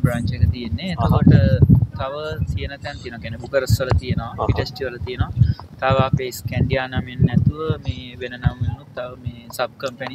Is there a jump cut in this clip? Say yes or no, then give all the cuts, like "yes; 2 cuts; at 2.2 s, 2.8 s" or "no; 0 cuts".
no; 0 cuts